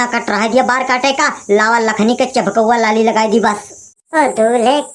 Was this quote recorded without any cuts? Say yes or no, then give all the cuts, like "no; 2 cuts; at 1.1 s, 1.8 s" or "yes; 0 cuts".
no; 1 cut; at 3.9 s